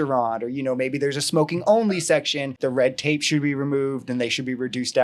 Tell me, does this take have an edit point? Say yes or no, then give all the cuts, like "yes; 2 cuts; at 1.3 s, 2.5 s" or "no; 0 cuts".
yes; 1 cut; at 2.6 s